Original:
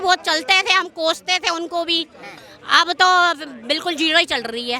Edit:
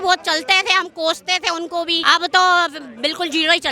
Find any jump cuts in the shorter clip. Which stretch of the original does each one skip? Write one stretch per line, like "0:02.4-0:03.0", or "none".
0:02.0-0:02.7